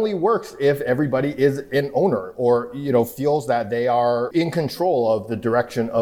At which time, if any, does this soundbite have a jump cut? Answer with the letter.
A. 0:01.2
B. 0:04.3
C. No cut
B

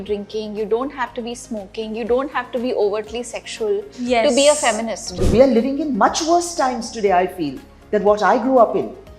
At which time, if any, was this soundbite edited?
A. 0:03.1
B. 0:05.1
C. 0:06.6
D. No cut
B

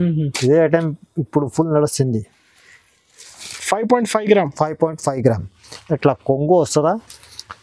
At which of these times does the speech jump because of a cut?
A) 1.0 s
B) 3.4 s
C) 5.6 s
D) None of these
B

